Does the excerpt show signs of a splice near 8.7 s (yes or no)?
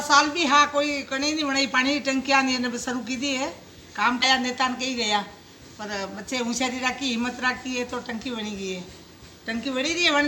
no